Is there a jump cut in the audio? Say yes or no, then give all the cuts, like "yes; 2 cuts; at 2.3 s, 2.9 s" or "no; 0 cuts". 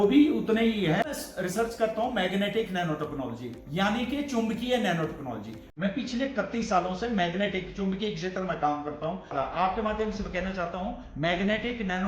yes; 2 cuts; at 1.2 s, 9.3 s